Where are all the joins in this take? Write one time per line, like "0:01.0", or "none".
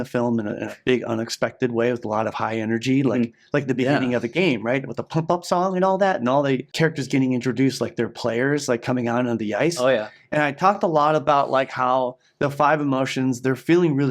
0:06.7

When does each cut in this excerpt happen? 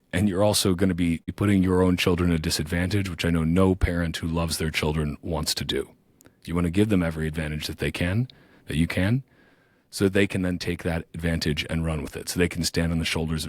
0:01.4

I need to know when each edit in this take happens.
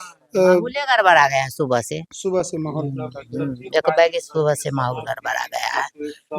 none

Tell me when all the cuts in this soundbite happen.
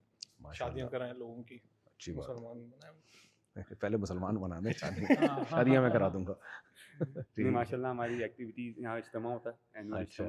none

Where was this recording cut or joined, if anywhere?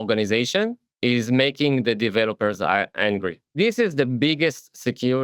0:03.5

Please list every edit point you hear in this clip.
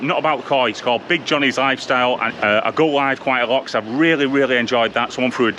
0:02.3

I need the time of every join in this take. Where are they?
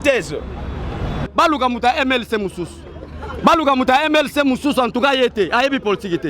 0:01.2

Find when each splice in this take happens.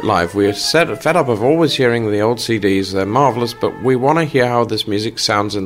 none

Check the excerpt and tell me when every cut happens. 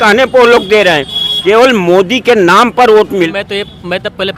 0:03.3

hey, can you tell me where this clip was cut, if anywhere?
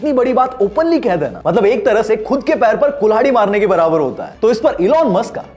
0:04.3

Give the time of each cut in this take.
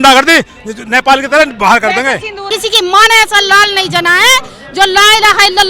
0:02.5

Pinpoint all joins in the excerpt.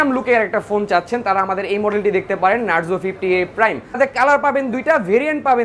0:04.0

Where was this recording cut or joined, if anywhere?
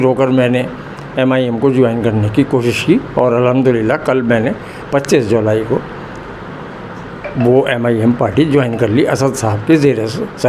none

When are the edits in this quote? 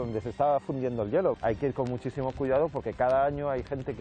0:01.4

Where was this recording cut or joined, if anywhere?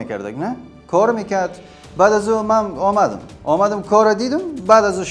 none

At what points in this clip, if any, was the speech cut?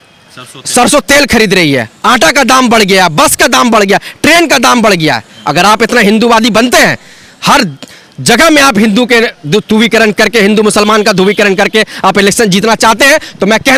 none

